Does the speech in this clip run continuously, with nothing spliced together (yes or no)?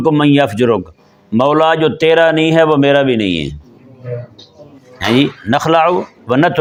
yes